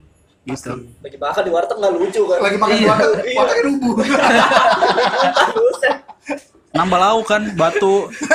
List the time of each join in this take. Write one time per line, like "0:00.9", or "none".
none